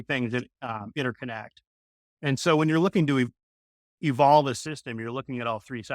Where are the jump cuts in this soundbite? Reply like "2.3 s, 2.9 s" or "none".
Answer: 3.4 s